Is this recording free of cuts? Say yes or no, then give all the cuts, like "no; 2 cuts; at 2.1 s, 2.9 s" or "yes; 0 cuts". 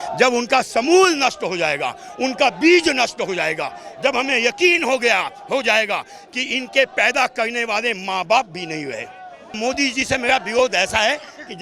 no; 1 cut; at 9.6 s